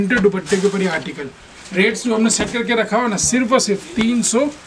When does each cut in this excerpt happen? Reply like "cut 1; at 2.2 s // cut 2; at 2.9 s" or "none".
none